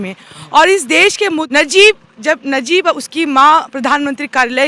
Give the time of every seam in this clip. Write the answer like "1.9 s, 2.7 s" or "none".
1.5 s